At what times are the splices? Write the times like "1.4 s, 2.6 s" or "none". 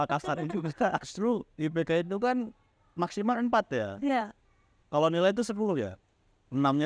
1.1 s

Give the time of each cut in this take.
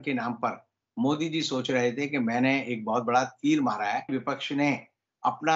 4.1 s

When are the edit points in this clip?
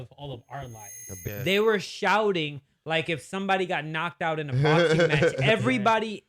1.1 s

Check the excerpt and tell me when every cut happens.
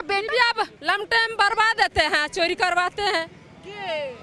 none

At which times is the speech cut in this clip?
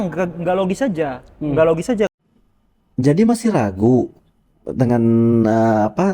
2.1 s

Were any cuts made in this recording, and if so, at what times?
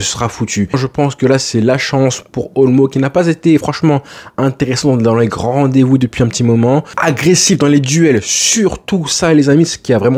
0.8 s, 7.0 s

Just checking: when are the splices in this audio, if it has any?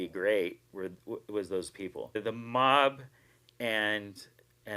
2.2 s

